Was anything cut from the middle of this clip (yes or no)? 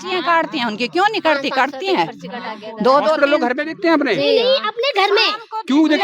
no